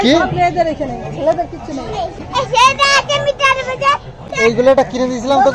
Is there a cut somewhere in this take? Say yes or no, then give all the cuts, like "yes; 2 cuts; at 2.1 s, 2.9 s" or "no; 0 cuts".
yes; 2 cuts; at 2.1 s, 4.5 s